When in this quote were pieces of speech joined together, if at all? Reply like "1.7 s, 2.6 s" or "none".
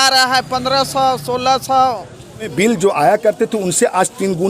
2.5 s